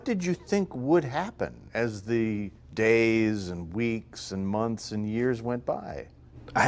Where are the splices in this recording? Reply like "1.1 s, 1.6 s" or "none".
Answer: 1.6 s, 2.6 s